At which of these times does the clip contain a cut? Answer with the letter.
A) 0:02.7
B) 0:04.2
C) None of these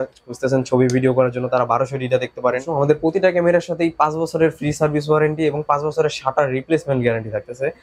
A